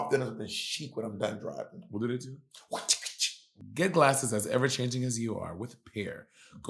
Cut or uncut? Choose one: cut